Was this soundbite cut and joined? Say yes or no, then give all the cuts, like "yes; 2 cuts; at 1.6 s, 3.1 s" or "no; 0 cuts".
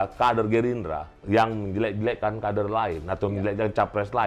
yes; 1 cut; at 1.1 s